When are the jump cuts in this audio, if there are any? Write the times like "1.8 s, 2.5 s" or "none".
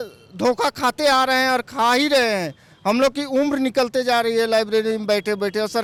none